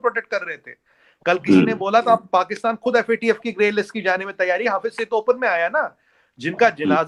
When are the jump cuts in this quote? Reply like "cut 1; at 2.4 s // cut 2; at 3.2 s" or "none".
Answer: none